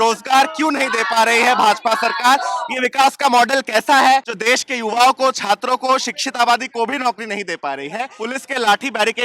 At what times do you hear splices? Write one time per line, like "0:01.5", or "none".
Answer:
0:04.3
0:08.1